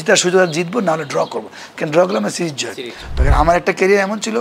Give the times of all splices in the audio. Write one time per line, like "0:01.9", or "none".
0:03.2